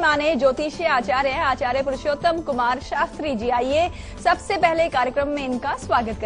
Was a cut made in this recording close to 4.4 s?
no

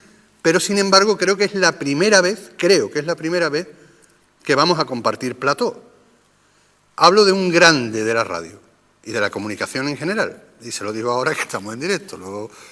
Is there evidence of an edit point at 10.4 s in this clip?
yes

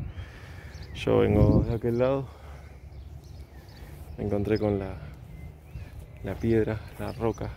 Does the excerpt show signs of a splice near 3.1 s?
no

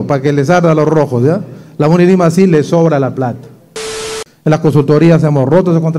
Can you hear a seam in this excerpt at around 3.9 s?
yes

